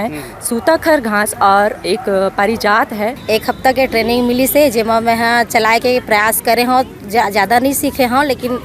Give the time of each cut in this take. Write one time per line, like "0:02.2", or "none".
0:03.2